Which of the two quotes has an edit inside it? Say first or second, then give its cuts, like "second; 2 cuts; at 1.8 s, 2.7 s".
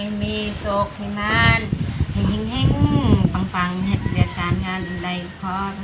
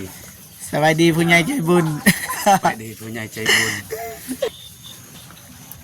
second; 1 cut; at 4.5 s